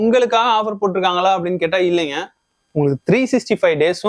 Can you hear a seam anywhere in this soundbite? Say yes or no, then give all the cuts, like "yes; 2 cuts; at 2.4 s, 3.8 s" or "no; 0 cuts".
no; 0 cuts